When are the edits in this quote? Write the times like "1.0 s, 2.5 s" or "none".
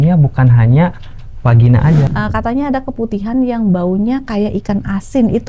2.1 s